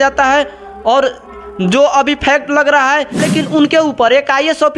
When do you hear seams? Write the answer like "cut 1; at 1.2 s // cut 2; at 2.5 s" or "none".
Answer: cut 1; at 3.3 s